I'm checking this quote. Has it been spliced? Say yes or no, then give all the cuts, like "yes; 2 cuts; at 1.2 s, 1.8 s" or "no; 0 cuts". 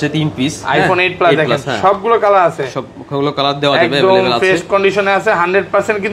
no; 0 cuts